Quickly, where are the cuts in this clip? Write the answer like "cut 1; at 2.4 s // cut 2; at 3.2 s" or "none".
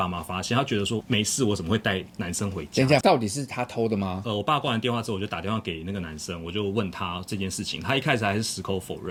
none